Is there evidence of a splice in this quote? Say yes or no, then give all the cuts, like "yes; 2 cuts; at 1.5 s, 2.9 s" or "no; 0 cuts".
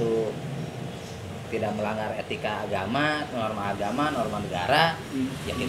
no; 0 cuts